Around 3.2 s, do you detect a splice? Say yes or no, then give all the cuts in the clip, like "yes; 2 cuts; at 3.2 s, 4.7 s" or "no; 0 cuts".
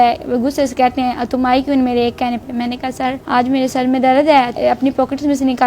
yes; 2 cuts; at 3.2 s, 4.6 s